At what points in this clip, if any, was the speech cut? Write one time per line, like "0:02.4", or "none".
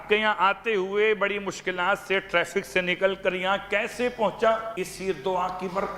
0:04.7